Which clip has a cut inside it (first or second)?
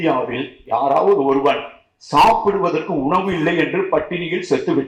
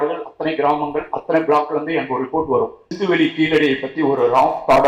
second